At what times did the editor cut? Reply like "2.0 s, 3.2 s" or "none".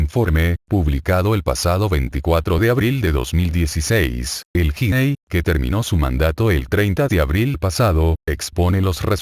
4.5 s